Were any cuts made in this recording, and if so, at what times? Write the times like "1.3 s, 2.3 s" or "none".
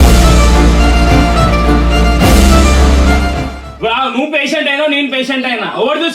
none